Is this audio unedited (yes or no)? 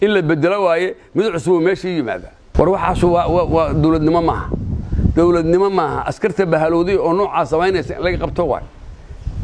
no